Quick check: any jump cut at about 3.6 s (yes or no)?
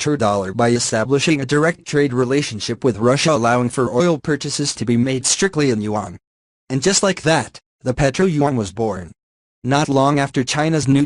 no